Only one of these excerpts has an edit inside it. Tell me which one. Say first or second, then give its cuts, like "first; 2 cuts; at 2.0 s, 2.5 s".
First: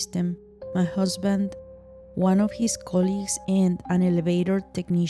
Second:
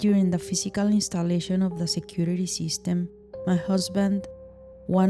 first; 1 cut; at 3.8 s